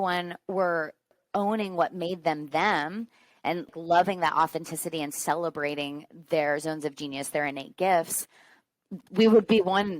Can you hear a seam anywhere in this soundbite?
yes; 2 cuts; at 1.1 s, 3.7 s

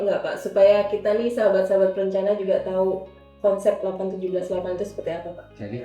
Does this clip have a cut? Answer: no; 0 cuts

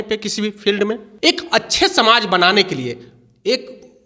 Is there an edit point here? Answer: yes; 1 cut; at 1.1 s

